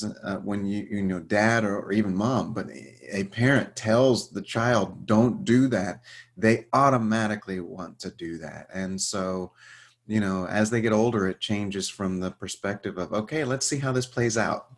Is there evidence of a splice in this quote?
no; 0 cuts

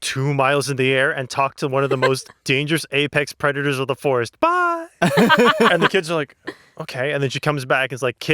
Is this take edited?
yes; 1 cut; at 2.3 s

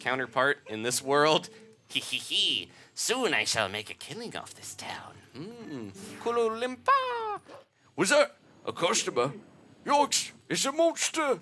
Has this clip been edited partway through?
yes; 1 cut; at 7.7 s

